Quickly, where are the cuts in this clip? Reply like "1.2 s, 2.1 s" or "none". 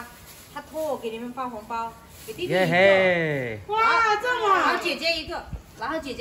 none